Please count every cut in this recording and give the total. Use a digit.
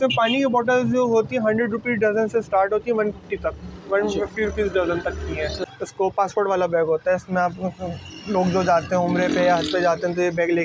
1